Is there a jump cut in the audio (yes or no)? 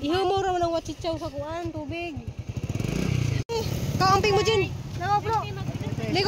yes